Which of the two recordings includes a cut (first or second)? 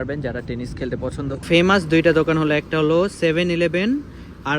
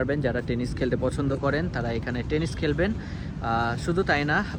first